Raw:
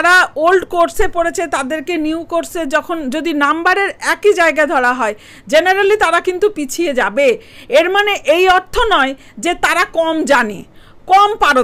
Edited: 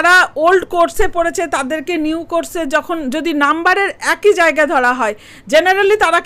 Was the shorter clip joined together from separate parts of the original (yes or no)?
no